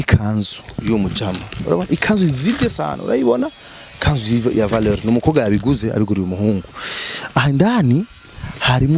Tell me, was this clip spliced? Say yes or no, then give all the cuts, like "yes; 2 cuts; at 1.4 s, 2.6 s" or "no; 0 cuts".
no; 0 cuts